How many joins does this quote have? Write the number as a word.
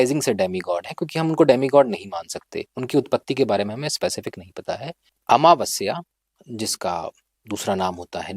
one